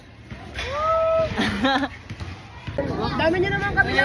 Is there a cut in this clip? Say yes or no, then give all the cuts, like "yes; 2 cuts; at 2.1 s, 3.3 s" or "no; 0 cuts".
yes; 1 cut; at 2.8 s